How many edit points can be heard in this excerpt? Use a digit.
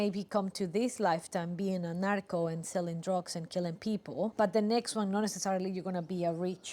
1